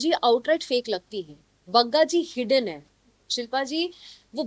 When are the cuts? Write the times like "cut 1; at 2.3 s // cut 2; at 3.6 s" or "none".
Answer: cut 1; at 3.3 s